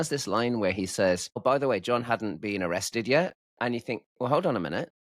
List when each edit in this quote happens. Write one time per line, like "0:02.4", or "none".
0:01.4
0:03.4